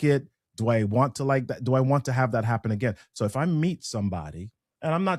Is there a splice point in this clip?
no; 0 cuts

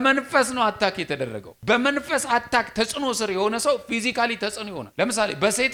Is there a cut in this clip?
no; 0 cuts

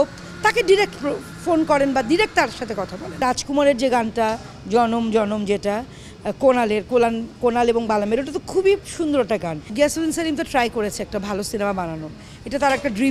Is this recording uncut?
no; 2 cuts; at 3.2 s, 9.7 s

